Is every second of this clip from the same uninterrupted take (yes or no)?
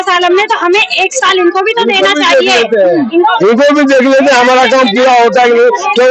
yes